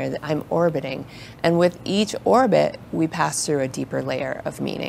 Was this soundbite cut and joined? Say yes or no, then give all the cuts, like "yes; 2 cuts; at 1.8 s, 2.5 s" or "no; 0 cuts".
no; 0 cuts